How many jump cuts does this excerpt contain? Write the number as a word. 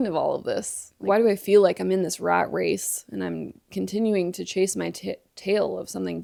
zero